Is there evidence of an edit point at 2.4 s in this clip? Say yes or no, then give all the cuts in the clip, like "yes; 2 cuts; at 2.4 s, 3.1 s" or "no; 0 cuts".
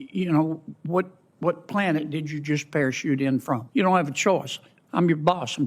no; 1 cut; at 3.6 s